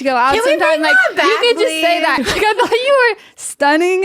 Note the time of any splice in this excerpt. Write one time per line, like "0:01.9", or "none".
0:02.2